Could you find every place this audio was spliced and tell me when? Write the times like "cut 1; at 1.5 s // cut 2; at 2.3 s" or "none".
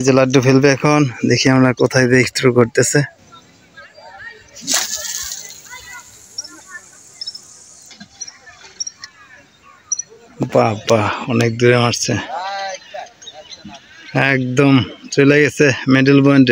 none